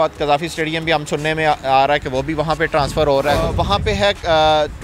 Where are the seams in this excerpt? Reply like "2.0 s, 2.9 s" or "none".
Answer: 3.6 s